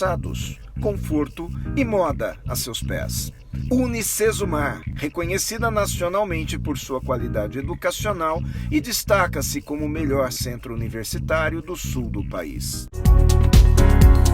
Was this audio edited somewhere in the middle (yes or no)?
yes